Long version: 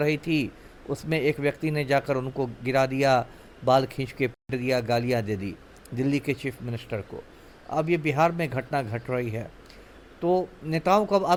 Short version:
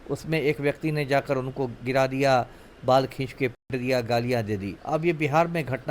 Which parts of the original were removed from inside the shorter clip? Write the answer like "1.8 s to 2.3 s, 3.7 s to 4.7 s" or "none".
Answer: 5.5 s to 7.6 s